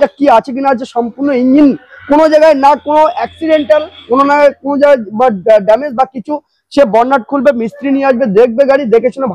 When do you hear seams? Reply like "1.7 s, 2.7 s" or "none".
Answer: none